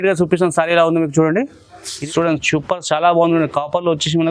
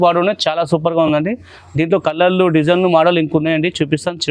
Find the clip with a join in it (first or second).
first